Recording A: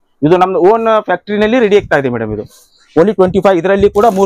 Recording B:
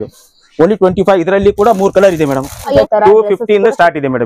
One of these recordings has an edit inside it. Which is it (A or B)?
B